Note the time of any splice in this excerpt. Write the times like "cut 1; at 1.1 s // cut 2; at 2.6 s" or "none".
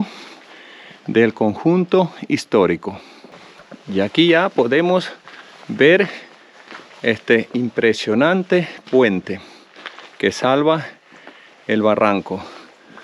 none